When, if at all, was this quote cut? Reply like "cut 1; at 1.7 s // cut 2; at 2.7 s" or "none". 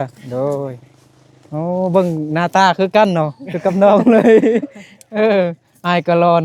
none